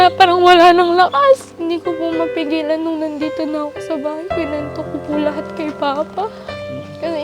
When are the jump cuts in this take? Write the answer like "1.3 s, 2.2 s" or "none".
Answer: 1.5 s